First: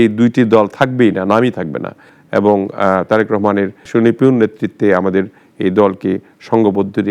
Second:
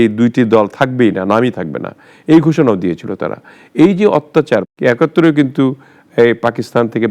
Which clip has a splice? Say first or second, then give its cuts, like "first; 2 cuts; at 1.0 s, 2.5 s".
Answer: first; 1 cut; at 2.1 s